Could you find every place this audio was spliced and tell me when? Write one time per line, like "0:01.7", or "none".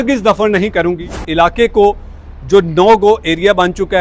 0:01.1